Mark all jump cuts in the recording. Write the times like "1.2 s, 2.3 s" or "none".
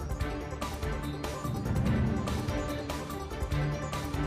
none